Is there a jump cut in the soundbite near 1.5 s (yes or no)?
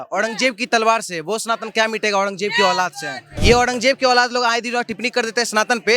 no